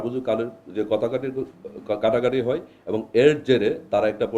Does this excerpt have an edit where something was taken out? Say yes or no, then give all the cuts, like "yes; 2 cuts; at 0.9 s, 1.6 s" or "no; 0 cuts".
no; 0 cuts